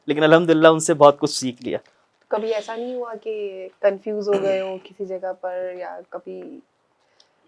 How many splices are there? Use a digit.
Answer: 0